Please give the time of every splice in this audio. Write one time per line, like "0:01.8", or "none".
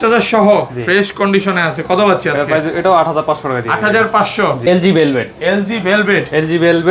0:04.6